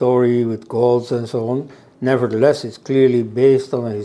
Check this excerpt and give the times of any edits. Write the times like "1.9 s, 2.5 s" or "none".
none